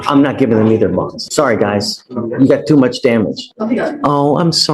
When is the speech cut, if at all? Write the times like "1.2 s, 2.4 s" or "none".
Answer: 1.2 s, 3.5 s